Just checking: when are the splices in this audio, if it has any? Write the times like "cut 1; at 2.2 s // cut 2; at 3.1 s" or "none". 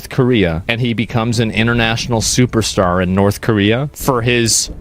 none